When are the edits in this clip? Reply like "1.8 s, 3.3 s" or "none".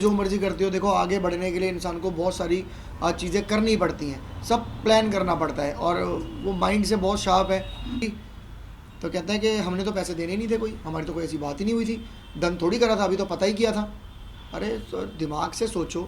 8.0 s